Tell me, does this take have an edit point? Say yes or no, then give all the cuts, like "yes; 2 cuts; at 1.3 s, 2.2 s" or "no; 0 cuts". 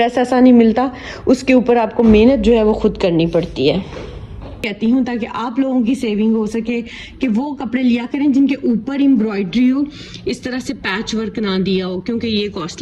yes; 1 cut; at 4.7 s